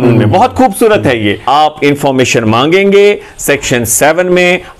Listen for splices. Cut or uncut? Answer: cut